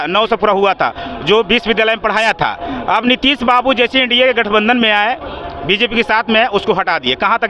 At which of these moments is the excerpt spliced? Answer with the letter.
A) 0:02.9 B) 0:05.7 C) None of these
C